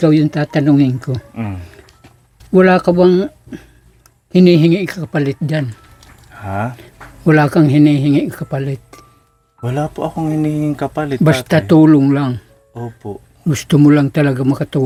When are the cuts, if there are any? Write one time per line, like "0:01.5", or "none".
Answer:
none